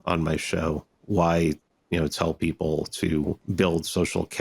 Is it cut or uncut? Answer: cut